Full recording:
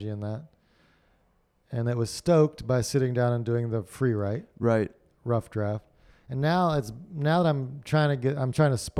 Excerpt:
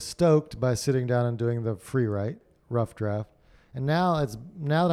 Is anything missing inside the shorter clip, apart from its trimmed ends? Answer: yes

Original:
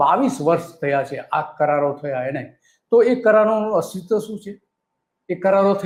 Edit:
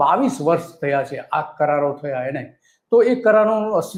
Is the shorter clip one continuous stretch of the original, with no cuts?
yes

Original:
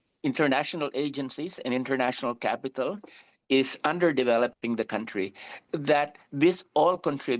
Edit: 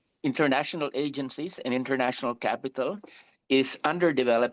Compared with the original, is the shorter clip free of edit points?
yes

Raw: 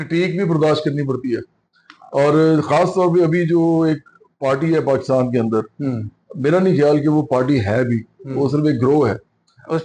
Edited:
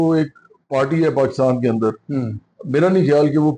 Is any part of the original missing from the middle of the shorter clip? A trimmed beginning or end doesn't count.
no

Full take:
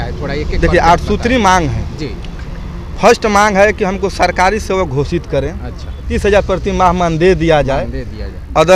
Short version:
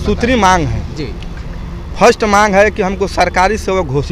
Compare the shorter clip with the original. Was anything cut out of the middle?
no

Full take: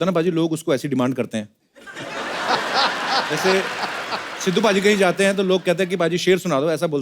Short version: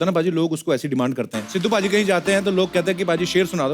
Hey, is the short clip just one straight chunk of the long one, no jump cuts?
no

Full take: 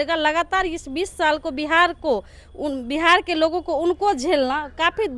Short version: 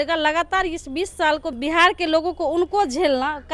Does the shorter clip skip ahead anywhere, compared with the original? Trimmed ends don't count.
yes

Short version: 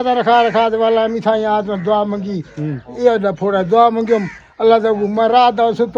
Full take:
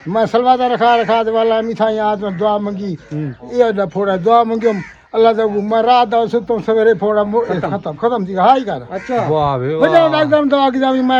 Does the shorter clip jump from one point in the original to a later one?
no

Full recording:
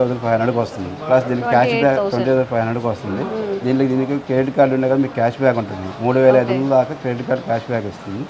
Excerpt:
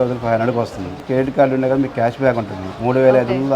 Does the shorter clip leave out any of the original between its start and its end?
yes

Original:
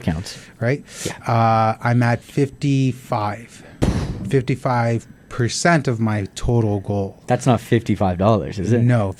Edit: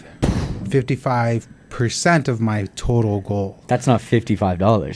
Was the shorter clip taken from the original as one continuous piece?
yes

